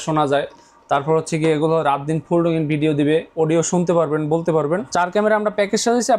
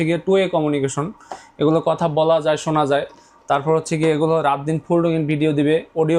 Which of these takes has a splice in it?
first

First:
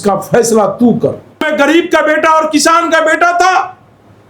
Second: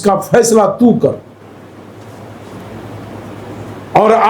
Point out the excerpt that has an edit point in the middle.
first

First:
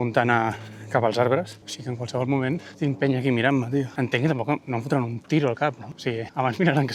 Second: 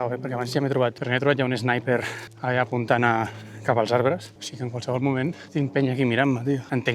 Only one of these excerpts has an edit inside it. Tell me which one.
second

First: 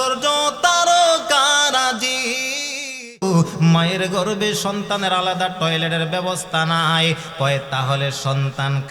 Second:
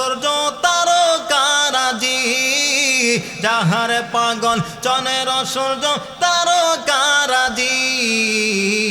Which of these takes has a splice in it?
first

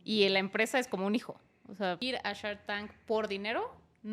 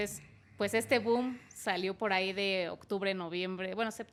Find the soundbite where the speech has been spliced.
first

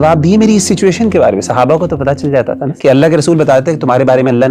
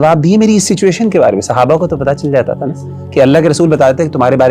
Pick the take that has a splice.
first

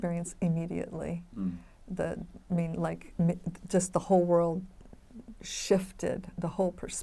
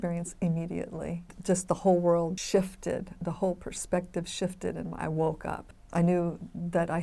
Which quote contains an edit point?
second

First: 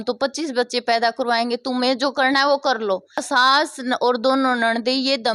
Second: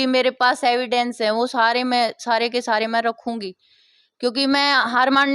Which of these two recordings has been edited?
first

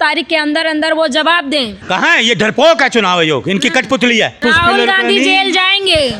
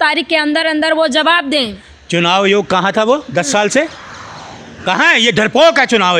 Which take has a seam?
first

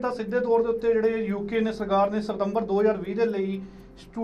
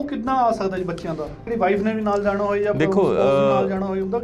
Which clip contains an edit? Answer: second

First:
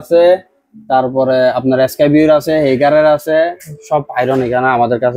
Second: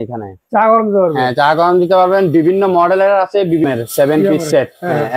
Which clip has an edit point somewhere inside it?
second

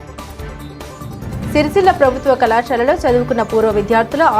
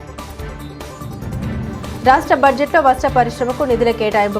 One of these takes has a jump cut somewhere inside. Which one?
second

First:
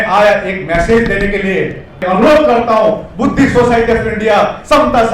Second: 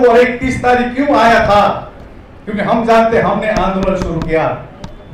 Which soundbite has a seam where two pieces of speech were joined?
first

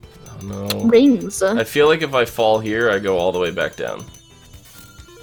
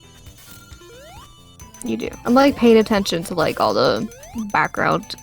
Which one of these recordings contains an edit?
second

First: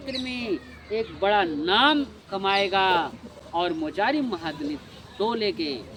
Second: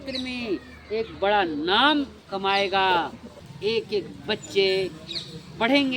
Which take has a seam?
second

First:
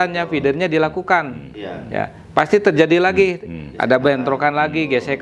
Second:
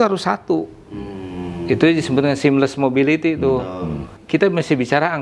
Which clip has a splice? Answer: second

